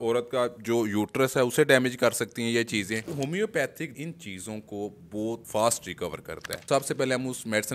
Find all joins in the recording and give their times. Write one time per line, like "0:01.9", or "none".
0:03.1
0:03.9
0:05.4
0:06.6